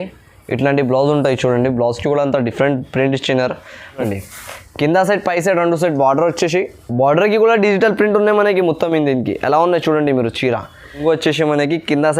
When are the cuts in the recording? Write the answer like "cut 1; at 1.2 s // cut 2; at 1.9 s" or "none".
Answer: cut 1; at 4.0 s // cut 2; at 11.0 s